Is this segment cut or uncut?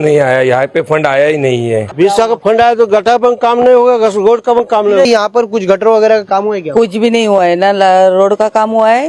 cut